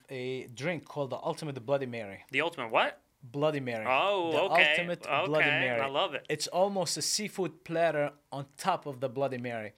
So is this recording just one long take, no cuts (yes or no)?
yes